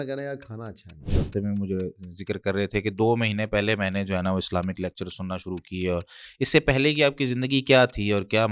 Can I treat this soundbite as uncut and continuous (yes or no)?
no